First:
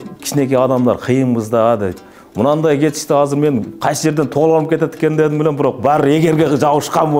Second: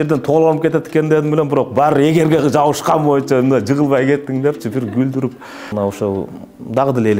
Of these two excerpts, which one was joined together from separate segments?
second; 1 cut; at 5.7 s

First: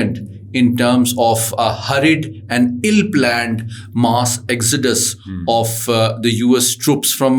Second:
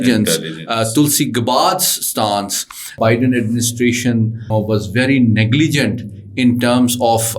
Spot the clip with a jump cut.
second; 2 cuts; at 2.9 s, 4.5 s

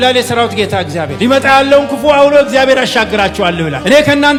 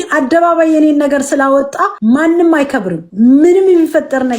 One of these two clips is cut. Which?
second; 2 cuts; at 1.9 s, 3.0 s

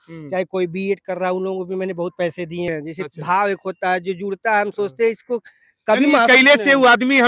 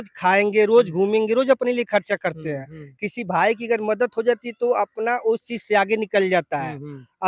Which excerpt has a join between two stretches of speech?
first; 1 cut; at 2.7 s

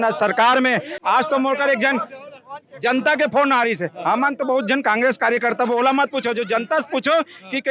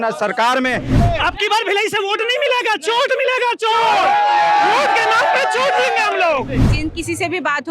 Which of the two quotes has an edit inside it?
second; 2 cuts; at 1.0 s, 6.6 s

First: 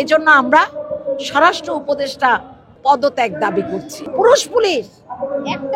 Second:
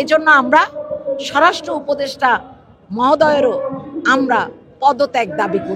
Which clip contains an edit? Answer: first; 2 cuts; at 2.6 s, 4.0 s

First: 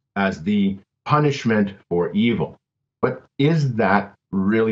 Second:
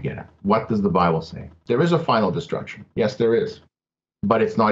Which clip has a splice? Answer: second; 1 cut; at 1.5 s

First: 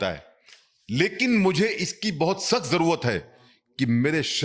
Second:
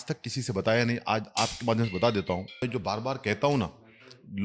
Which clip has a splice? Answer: second; 1 cut; at 2.6 s

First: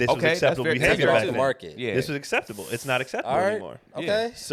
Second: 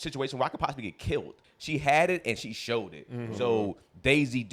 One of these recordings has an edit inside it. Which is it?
second; 1 cut; at 1.4 s

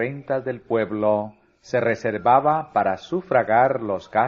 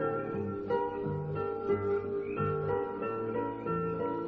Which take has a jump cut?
first; 1 cut; at 1.4 s

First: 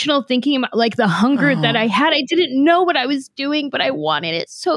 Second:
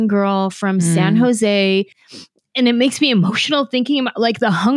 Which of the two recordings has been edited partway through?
second; 1 cut; at 2.0 s

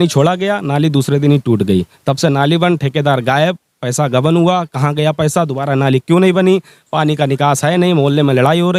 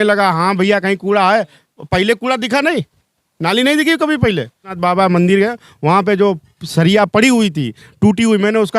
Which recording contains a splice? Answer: second; 1 cut; at 4.7 s

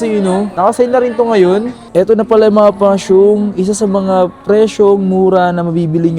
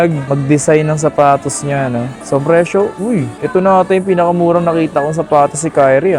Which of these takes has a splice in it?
first; 1 cut; at 1.8 s

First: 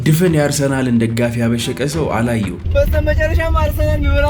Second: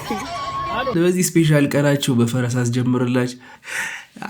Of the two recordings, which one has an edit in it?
second; 1 cut; at 0.9 s

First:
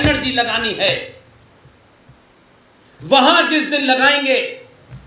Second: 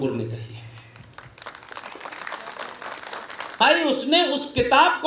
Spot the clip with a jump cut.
second; 1 cut; at 3.6 s

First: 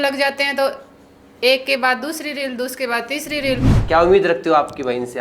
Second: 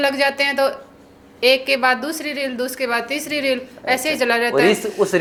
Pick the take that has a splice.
first; 1 cut; at 3.7 s

